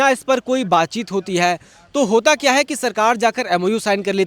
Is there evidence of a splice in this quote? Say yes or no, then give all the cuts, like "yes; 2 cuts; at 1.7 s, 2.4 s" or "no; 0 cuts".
no; 0 cuts